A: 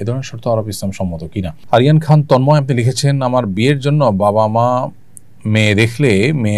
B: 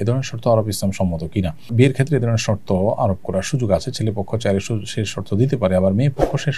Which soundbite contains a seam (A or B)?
A